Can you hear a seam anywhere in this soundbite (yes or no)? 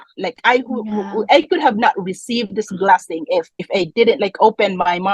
yes